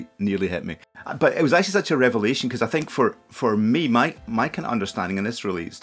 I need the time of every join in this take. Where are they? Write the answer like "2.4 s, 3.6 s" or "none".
1.0 s, 4.2 s